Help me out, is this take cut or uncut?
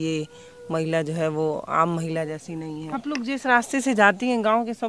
cut